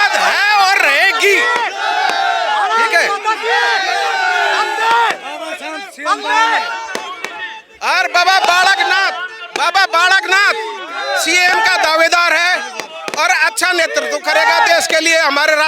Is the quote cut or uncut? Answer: uncut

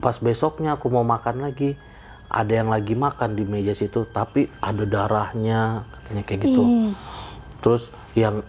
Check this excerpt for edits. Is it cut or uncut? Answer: uncut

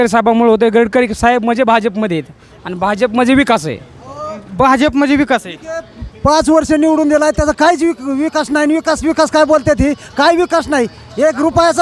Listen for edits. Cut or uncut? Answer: uncut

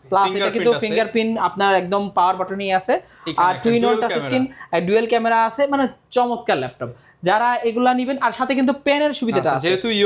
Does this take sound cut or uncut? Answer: uncut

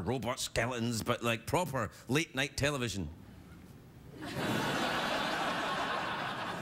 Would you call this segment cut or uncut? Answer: cut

